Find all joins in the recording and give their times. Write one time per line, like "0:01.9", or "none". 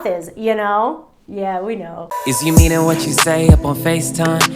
0:01.8